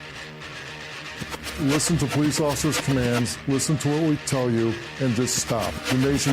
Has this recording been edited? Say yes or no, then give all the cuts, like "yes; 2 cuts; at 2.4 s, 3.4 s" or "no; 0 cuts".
yes; 1 cut; at 1.1 s